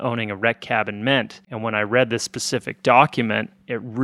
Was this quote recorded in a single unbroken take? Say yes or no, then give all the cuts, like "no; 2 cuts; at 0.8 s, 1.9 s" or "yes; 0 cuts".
yes; 0 cuts